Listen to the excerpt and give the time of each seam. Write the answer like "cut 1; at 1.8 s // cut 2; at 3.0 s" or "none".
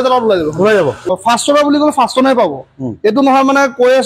cut 1; at 1.1 s